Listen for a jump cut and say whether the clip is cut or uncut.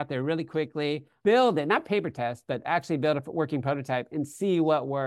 cut